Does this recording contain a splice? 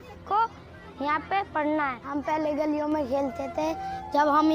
yes; 1 cut; at 2.0 s

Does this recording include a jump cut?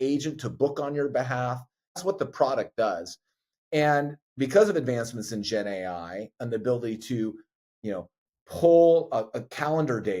yes; 1 cut; at 2.0 s

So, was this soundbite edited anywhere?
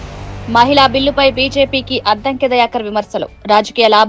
no; 0 cuts

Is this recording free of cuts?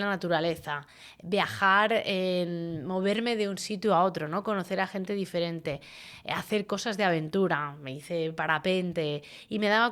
yes; 0 cuts

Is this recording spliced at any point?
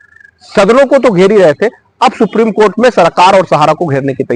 no; 0 cuts

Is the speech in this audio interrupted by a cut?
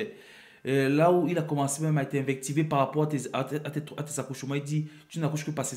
no; 0 cuts

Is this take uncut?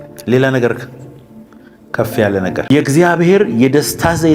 no; 1 cut; at 2.7 s

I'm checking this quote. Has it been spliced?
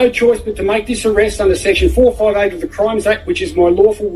no; 0 cuts

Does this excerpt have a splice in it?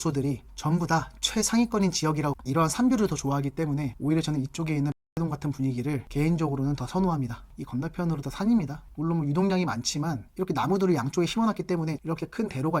yes; 3 cuts; at 2.4 s, 7.5 s, 12.0 s

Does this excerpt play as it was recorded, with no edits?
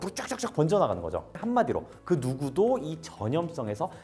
no; 1 cut; at 1.3 s

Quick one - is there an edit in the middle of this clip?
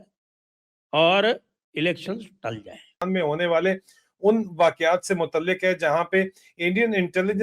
yes; 1 cut; at 2.9 s

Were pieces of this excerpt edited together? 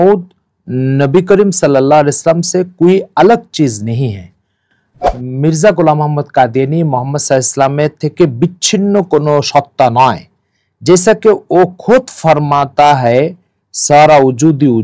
no; 0 cuts

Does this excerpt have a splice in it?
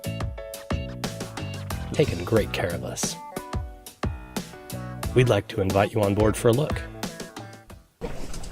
no; 0 cuts

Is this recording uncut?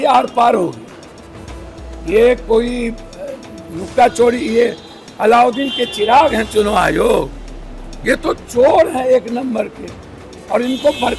yes; 0 cuts

